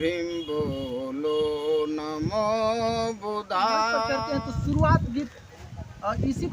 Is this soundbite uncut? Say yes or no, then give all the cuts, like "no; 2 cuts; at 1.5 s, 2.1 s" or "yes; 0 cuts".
no; 1 cut; at 4.1 s